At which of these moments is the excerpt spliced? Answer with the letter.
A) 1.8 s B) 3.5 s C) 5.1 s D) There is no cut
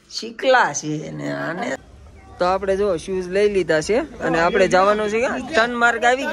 A